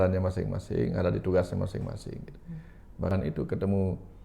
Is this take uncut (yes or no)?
no